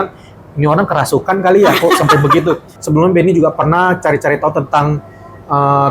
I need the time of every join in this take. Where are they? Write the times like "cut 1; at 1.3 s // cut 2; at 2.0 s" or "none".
cut 1; at 2.7 s